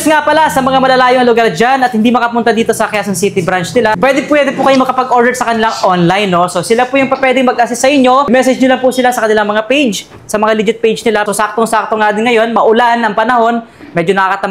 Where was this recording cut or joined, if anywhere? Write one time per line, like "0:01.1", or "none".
0:04.0
0:08.3
0:11.2